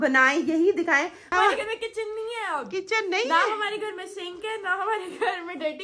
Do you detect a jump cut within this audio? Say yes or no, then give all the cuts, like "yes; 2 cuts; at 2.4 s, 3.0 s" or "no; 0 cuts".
yes; 1 cut; at 1.2 s